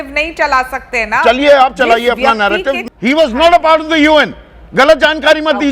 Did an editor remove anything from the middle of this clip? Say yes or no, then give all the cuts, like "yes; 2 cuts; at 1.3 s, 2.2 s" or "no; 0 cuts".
yes; 1 cut; at 2.8 s